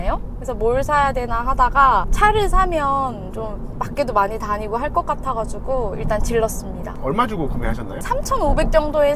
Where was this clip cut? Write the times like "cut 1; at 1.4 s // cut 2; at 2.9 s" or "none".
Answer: none